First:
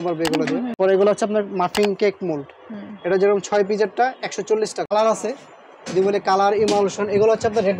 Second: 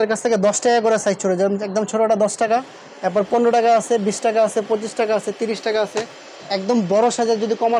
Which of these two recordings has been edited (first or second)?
first